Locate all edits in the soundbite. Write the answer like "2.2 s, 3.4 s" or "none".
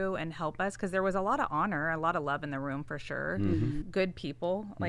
3.8 s